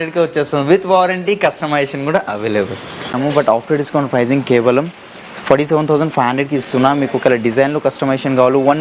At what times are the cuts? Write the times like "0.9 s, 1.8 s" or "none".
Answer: 3.1 s

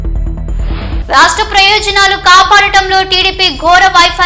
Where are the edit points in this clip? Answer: 0.9 s

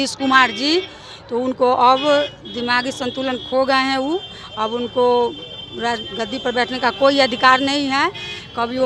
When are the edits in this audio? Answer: none

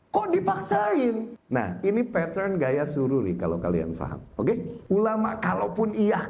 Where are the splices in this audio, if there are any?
1.4 s, 4.7 s

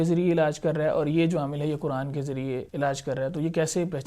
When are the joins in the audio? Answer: 2.7 s

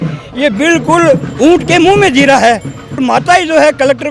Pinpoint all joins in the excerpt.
3.0 s

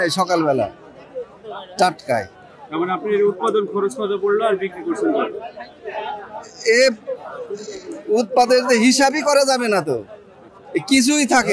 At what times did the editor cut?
none

